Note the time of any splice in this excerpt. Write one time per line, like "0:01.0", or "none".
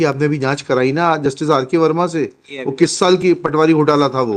none